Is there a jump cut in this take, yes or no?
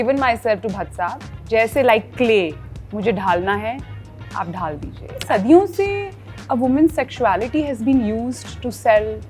yes